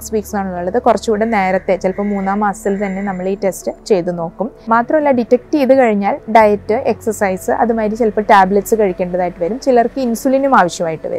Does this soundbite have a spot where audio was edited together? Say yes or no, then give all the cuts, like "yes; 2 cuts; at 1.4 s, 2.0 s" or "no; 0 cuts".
yes; 2 cuts; at 3.8 s, 4.6 s